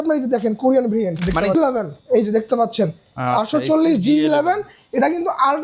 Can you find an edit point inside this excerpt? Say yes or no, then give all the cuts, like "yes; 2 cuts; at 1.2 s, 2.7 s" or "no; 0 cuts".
yes; 1 cut; at 1.6 s